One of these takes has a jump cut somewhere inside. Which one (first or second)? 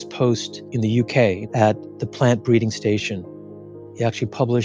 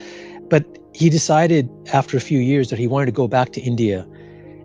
first